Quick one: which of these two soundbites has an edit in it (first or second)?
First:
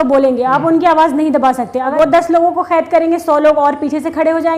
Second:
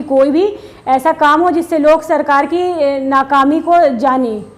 first